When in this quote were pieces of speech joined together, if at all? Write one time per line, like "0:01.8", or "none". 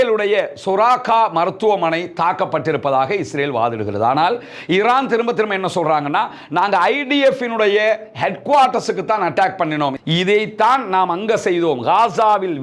0:09.9